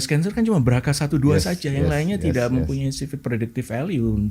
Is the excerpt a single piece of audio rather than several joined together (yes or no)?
yes